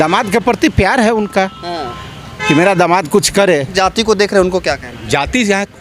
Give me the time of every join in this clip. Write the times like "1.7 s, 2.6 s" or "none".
3.7 s